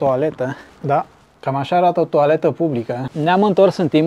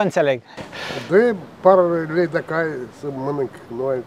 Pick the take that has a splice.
first; 1 cut; at 1.2 s

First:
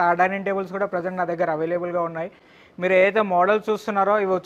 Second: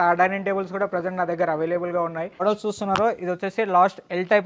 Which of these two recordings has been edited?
second; 1 cut; at 2.4 s

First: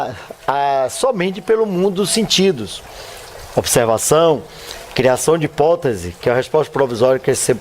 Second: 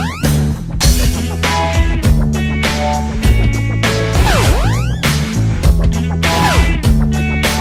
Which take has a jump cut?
first; 1 cut; at 4.4 s

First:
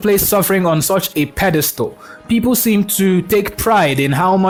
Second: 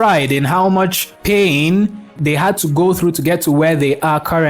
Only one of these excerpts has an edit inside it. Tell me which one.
second; 1 cut; at 2.1 s

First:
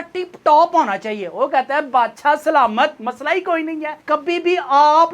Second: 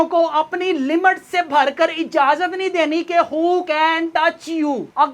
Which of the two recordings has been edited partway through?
first; 1 cut; at 3.9 s

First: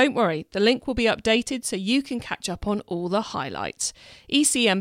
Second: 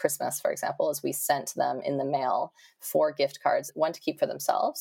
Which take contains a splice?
second; 1 cut; at 3.7 s

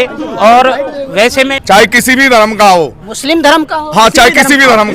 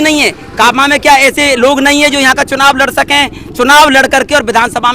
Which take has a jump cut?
first; 1 cut; at 1.5 s

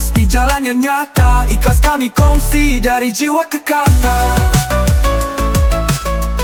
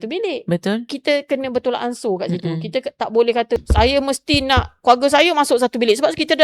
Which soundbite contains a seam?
second; 2 cuts; at 0.9 s, 3.6 s

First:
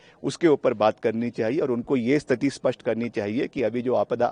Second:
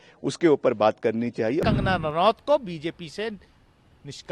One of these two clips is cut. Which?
second; 1 cut; at 1.6 s

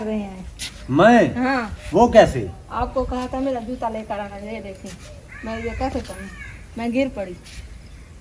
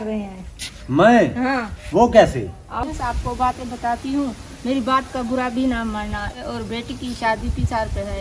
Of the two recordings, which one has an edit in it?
second; 2 cuts; at 2.9 s, 6.3 s

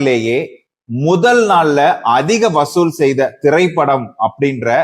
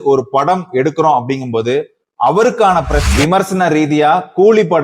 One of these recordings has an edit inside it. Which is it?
second; 1 cut; at 3.0 s

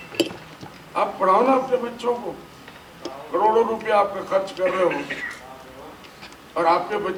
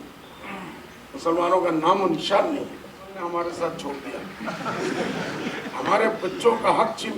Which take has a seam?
second; 1 cut; at 3.1 s

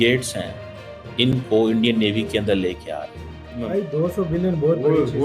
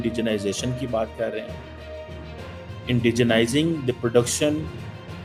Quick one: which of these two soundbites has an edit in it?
first; 1 cut; at 3.6 s

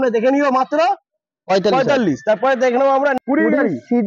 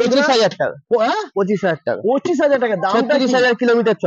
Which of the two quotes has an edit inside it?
first; 1 cut; at 3.1 s

